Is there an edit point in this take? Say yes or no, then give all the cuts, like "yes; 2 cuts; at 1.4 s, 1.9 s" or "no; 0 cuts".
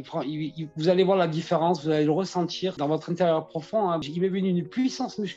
yes; 2 cuts; at 2.7 s, 4.0 s